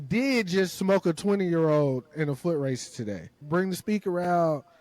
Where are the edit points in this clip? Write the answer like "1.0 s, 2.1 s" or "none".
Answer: 3.4 s